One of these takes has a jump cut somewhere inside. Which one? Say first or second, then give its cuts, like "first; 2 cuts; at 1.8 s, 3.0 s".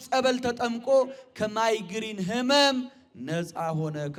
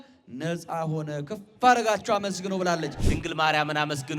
second; 1 cut; at 3.0 s